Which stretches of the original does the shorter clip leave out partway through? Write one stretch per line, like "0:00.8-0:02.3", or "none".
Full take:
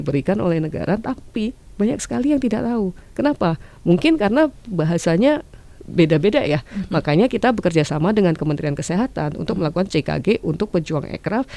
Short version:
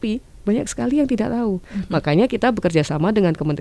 0:03.0-0:06.7